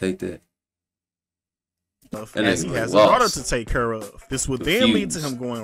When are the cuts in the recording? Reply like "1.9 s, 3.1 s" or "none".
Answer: 2.2 s